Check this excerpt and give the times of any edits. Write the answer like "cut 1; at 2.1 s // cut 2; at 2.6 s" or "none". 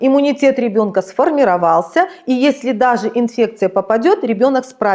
none